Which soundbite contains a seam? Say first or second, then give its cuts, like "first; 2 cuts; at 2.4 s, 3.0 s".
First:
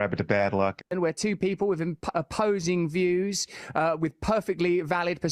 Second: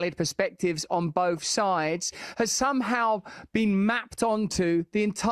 first; 1 cut; at 0.9 s